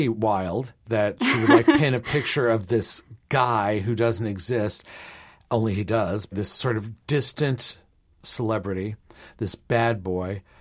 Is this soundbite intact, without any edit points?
no; 3 cuts; at 0.8 s, 6.3 s, 8.2 s

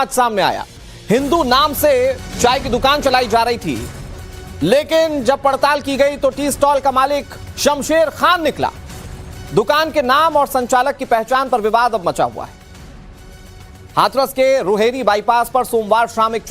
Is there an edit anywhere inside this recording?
yes; 1 cut; at 14.8 s

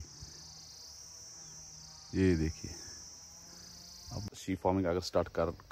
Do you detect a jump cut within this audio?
yes; 1 cut; at 4.2 s

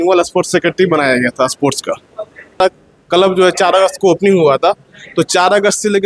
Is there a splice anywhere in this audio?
yes; 1 cut; at 2.6 s

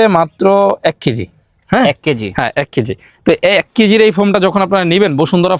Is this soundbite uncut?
yes; 0 cuts

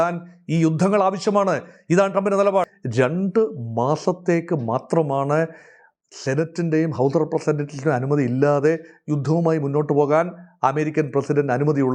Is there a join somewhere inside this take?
yes; 1 cut; at 2.8 s

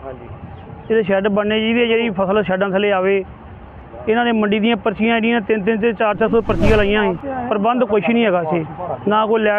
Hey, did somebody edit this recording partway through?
no; 0 cuts

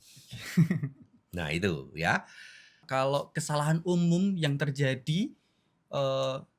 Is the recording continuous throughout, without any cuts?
no; 1 cut; at 2.8 s

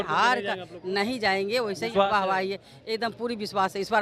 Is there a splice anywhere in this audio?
no; 0 cuts

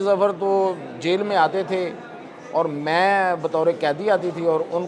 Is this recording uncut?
yes; 0 cuts

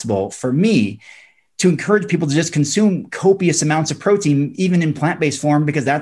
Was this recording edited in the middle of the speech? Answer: no; 0 cuts

